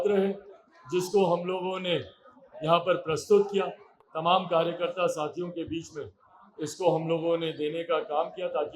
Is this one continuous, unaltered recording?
yes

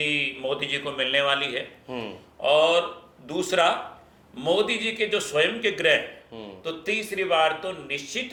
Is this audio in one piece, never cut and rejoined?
yes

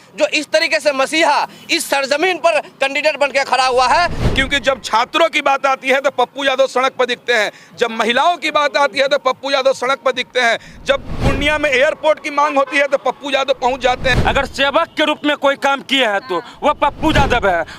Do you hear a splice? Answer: yes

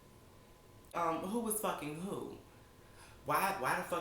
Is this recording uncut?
no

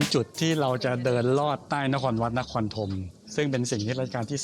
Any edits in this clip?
no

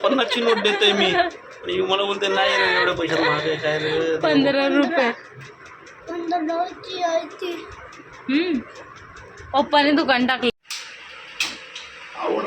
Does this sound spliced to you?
yes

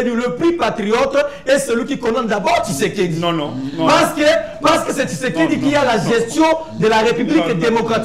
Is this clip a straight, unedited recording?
yes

